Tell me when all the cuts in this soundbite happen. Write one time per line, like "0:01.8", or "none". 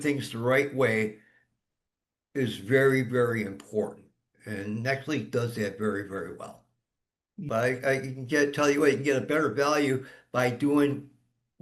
0:07.4

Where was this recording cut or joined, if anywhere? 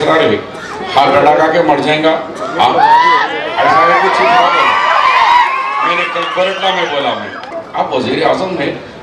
0:07.6

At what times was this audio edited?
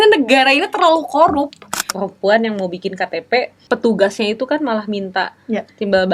0:01.9
0:03.6

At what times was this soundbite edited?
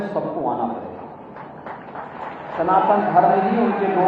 none

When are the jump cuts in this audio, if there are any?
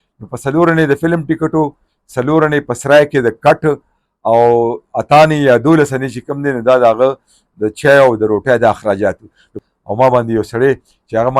0:09.6

